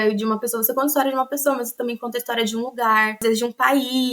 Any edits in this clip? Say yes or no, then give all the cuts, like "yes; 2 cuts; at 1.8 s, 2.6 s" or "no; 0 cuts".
yes; 1 cut; at 3.2 s